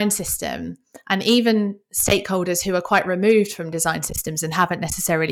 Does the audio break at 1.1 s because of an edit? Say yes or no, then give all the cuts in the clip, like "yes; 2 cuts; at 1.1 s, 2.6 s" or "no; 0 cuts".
no; 0 cuts